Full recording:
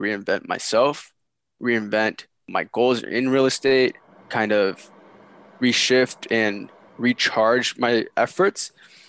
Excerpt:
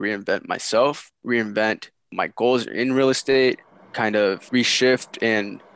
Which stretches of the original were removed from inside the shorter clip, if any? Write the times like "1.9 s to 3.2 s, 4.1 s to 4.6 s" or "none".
1.1 s to 1.5 s, 4.8 s to 5.5 s